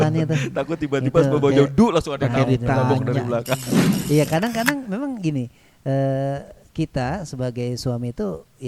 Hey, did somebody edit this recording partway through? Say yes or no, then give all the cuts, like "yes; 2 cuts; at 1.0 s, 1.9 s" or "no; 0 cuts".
yes; 1 cut; at 3.9 s